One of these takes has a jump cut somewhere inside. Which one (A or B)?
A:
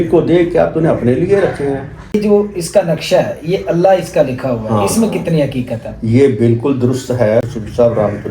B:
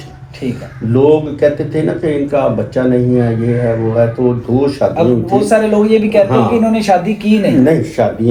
A